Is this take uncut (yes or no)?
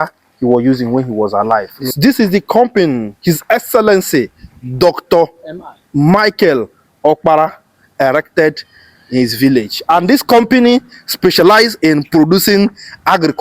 no